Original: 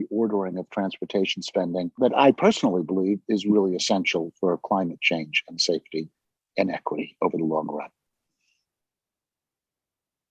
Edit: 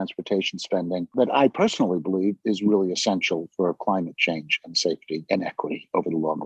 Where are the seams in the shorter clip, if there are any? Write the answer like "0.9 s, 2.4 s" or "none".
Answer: 5.2 s